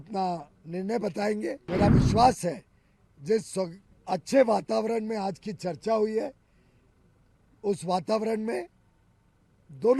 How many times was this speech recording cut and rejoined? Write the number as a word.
one